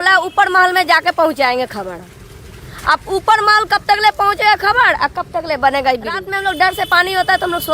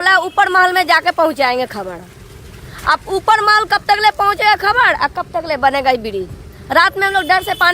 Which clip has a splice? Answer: first; 1 cut; at 6.3 s

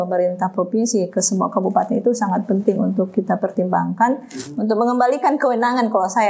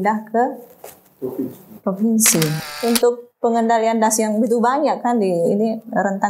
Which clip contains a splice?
second; 1 cut; at 2.6 s

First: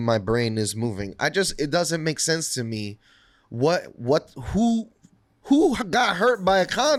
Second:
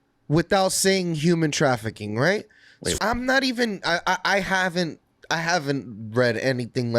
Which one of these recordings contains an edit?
second; 1 cut; at 3.0 s

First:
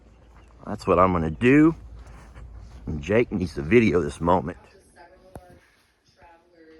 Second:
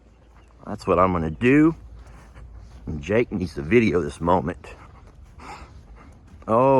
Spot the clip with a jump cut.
first; 1 cut; at 4.6 s

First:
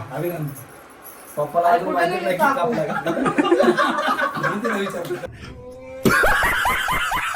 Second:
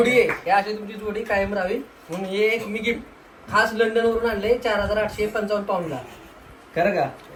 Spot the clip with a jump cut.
first; 2 cuts; at 3.8 s, 5.4 s

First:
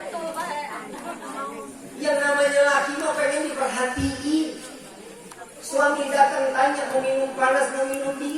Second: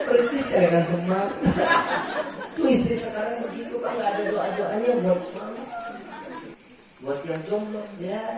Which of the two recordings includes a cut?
second; 1 cut; at 6.5 s

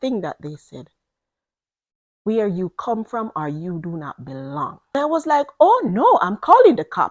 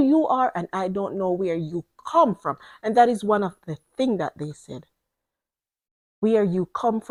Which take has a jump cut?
first; 1 cut; at 4.9 s

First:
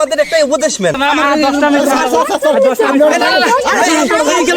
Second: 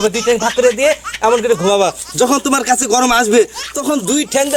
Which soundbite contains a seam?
first; 1 cut; at 1.0 s

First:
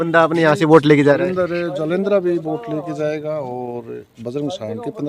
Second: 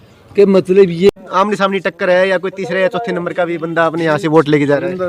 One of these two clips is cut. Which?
second; 1 cut; at 1.1 s

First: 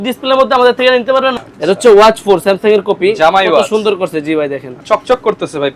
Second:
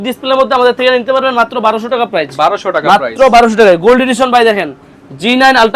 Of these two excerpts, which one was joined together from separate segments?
first; 2 cuts; at 1.3 s, 4.8 s

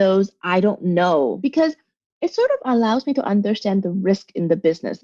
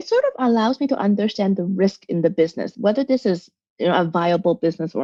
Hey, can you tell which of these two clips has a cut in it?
first; 1 cut; at 1.4 s

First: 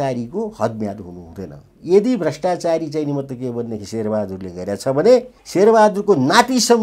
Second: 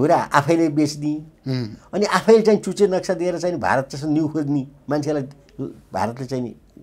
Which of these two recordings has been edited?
first; 1 cut; at 5.4 s

